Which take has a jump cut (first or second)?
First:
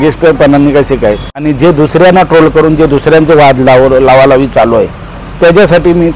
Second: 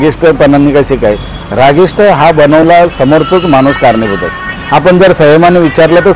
first